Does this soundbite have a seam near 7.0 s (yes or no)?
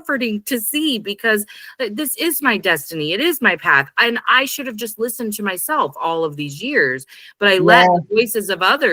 no